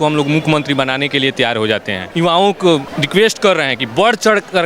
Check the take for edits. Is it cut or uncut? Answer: cut